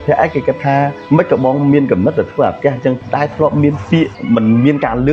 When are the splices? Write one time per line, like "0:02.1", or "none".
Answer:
0:01.0
0:03.0
0:04.2